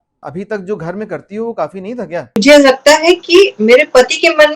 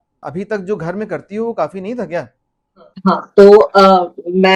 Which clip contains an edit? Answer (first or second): first